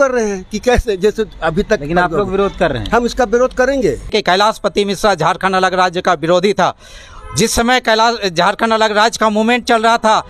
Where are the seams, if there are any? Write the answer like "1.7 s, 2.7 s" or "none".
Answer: 4.1 s